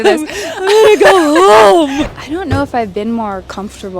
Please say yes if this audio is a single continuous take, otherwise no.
no